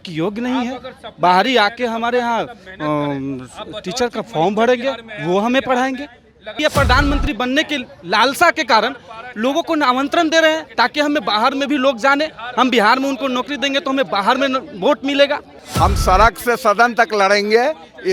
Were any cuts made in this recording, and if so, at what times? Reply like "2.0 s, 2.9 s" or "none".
6.6 s, 15.5 s

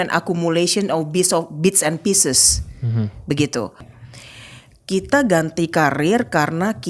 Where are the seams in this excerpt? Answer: 3.9 s

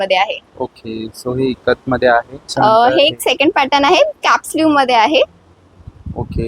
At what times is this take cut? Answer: 2.5 s

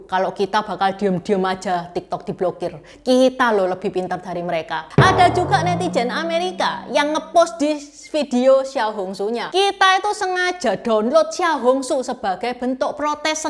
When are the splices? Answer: 4.8 s, 9.4 s

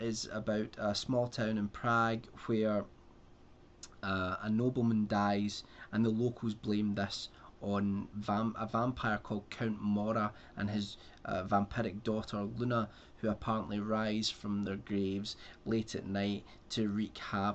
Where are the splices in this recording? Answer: 11.7 s

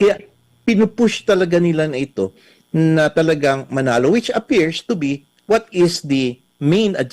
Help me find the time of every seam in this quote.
none

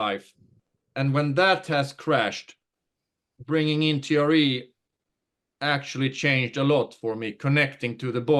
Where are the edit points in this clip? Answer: none

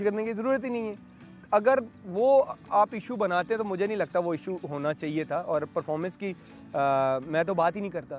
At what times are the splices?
none

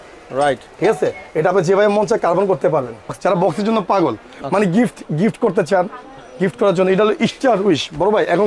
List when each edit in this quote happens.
3.2 s

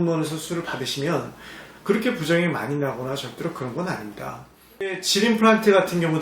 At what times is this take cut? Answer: 5.0 s

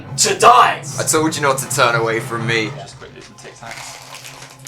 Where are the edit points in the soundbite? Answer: none

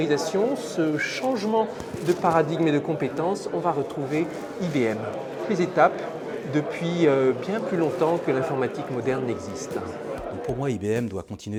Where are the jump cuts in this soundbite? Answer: none

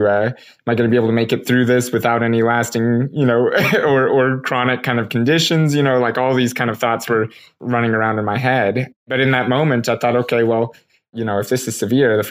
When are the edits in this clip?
7.5 s, 9.1 s, 11.1 s

